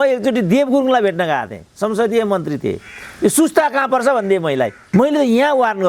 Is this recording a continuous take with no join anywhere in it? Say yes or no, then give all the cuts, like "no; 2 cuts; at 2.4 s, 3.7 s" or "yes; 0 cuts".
no; 1 cut; at 4.8 s